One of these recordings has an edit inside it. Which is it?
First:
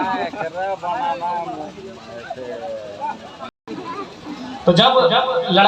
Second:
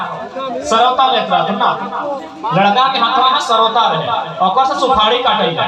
first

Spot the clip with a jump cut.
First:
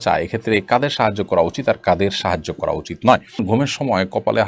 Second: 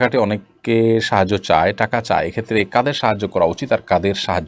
first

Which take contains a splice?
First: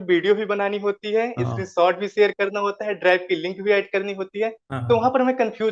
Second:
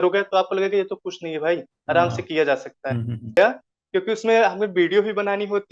second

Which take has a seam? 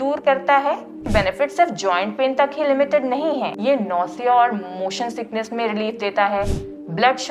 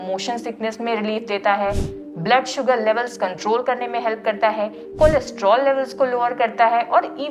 first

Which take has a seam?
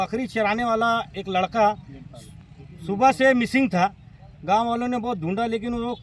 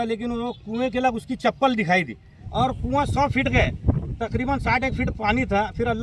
second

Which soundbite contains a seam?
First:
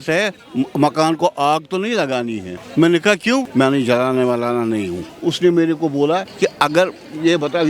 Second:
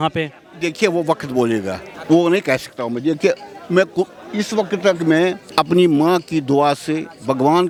first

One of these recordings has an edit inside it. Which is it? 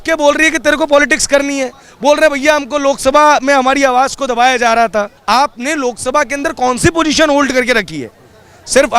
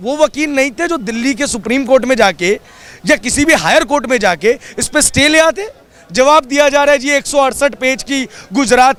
first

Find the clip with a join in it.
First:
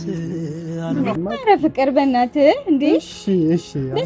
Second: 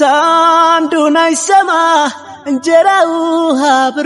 first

